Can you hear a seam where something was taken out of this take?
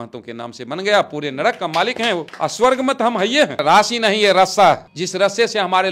yes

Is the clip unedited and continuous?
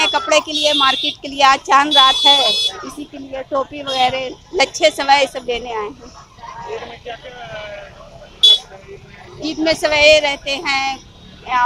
yes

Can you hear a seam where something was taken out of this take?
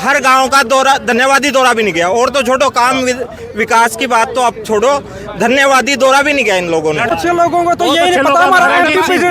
yes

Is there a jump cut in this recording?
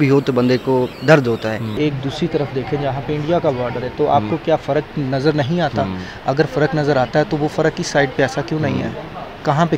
yes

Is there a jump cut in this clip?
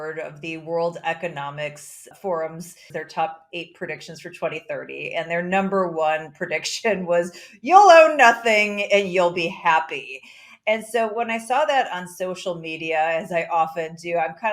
yes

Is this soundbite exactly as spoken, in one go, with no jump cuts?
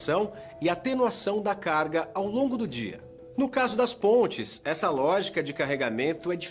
yes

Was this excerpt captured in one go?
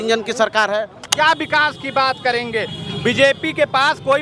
no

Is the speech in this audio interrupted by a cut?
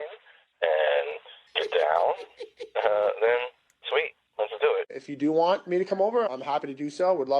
yes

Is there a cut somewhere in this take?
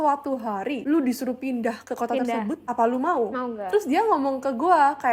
no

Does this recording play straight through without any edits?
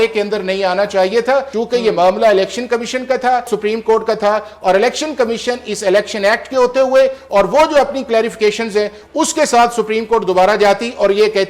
no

